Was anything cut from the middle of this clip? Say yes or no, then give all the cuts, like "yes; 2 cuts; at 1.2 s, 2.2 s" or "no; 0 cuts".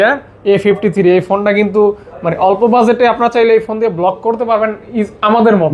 no; 0 cuts